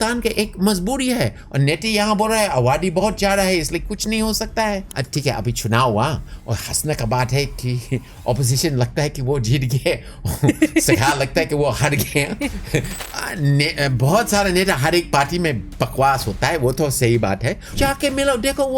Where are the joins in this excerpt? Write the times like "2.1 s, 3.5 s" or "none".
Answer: 5.0 s, 12.9 s, 17.7 s